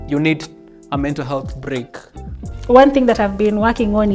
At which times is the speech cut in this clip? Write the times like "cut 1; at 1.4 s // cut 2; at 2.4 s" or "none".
cut 1; at 2.5 s